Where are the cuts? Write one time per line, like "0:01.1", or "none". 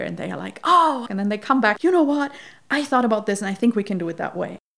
0:01.8